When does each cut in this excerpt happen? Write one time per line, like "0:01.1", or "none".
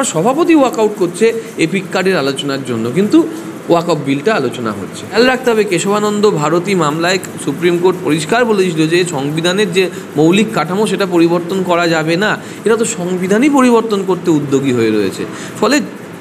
0:05.1

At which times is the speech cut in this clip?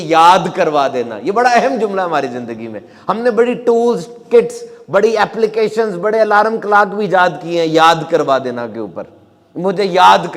none

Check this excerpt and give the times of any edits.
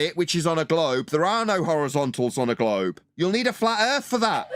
0:03.0

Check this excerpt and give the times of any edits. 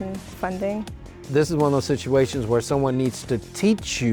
0:01.2

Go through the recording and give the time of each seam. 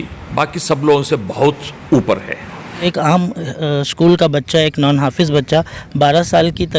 0:02.8

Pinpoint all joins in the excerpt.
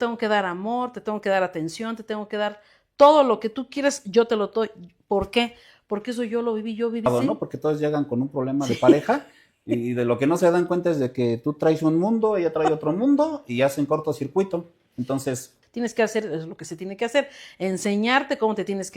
0:07.1
0:15.6

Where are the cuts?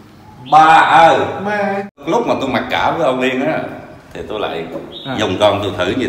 0:02.0

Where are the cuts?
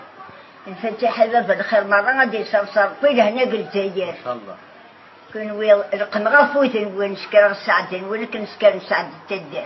none

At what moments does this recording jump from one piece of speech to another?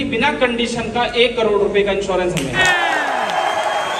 none

